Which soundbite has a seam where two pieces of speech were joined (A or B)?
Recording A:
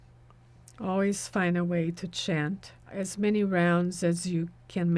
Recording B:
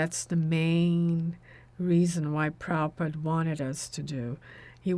A